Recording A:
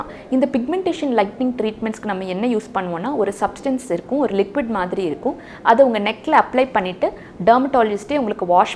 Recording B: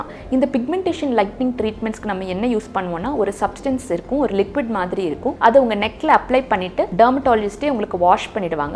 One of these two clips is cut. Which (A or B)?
B